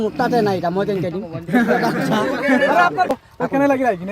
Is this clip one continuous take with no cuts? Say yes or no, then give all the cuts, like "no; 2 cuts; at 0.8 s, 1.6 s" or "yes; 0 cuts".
no; 1 cut; at 3.1 s